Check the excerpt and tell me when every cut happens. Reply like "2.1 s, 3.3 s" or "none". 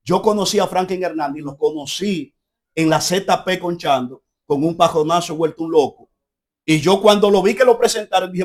none